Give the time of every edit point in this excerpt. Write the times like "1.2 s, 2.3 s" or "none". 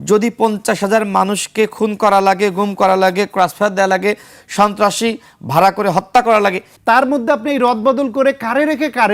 6.7 s

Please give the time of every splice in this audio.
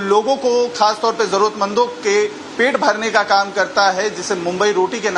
1.6 s

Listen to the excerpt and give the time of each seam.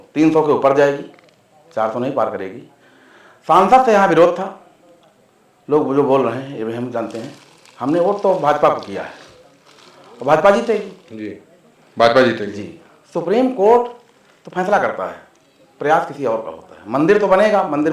none

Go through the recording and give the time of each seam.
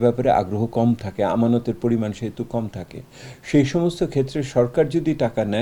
none

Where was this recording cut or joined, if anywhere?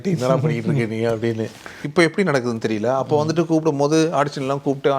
1.8 s

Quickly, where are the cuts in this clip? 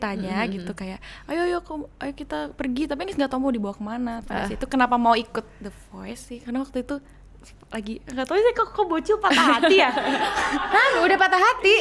4.2 s, 6.3 s

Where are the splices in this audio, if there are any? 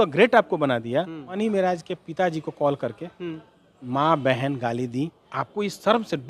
1.3 s, 5.2 s

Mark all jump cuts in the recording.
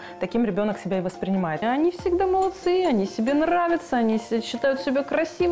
1.6 s

